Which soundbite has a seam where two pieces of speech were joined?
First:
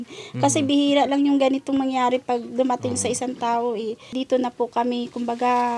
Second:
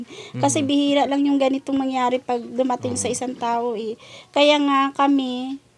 first; 1 cut; at 4.1 s

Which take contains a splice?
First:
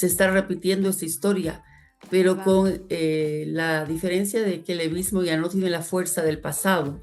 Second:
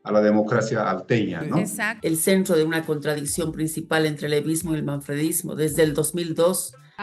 second; 1 cut; at 1.9 s

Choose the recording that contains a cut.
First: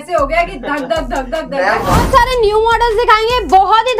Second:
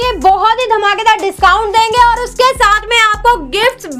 first; 1 cut; at 2.0 s

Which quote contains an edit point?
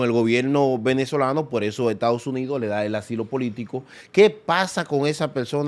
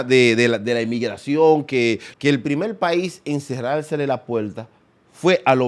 second; 1 cut; at 2.1 s

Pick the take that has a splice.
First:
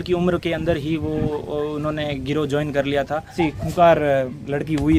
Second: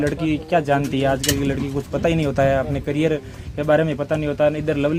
first; 1 cut; at 3.3 s

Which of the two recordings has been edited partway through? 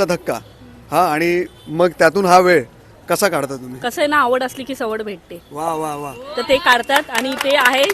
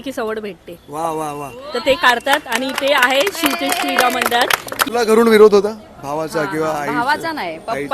second; 1 cut; at 4.8 s

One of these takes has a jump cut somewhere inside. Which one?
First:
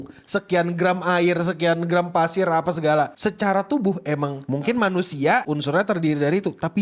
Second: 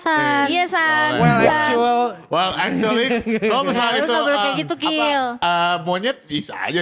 first; 2 cuts; at 4.4 s, 5.5 s

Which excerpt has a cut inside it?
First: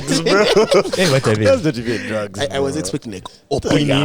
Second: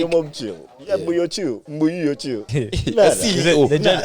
second; 2 cuts; at 1.7 s, 2.4 s

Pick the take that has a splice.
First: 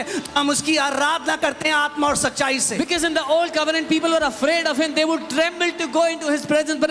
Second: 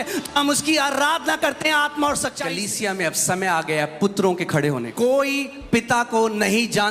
second; 2 cuts; at 2.5 s, 4.9 s

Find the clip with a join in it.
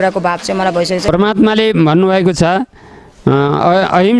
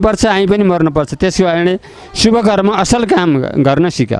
first; 1 cut; at 1.1 s

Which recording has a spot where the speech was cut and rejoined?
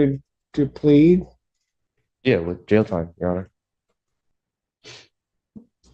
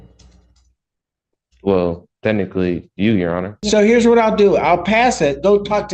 second; 1 cut; at 3.6 s

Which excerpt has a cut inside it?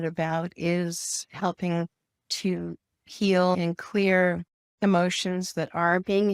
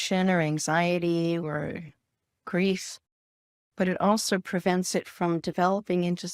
first; 1 cut; at 3.6 s

